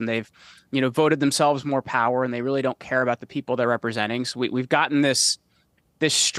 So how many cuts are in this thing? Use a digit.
0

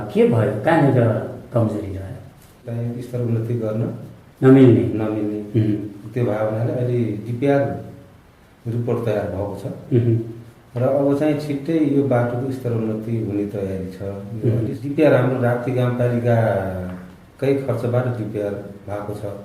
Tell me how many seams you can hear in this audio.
2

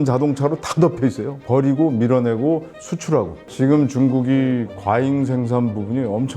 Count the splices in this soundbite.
1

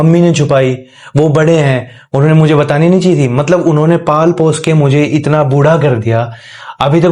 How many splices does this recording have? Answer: 0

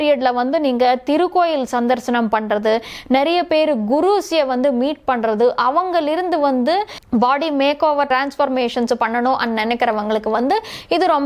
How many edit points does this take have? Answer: 1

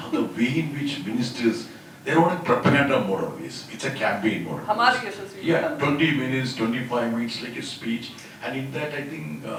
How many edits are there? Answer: 0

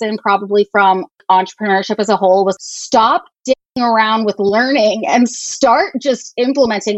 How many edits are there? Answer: 2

